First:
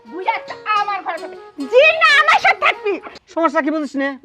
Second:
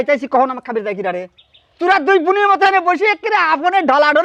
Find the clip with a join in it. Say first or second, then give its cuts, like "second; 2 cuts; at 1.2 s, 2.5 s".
first; 1 cut; at 3.2 s